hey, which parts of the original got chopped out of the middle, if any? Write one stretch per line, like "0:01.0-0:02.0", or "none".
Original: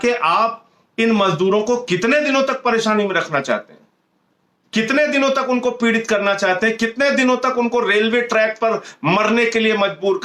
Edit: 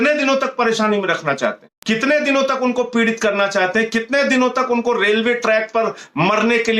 0:03.8-0:04.6